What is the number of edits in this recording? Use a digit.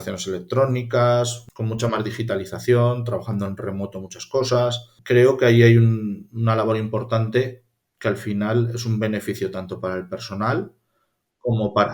2